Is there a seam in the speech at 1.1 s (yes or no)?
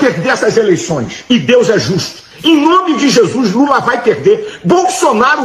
yes